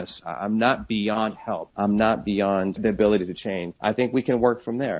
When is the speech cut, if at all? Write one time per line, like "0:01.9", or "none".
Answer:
0:01.7
0:02.8
0:03.7